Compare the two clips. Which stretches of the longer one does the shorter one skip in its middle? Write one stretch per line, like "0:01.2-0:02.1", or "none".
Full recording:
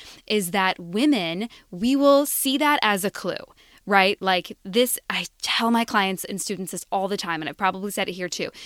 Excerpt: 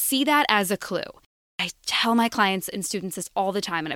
0:03.8-0:05.0